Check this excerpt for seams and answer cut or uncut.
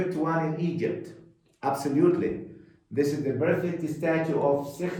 uncut